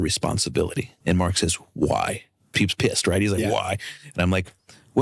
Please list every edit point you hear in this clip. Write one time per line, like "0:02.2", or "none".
0:00.9
0:02.5